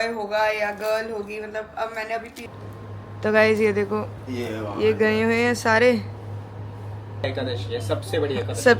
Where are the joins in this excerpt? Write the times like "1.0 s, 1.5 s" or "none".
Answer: 2.5 s, 7.2 s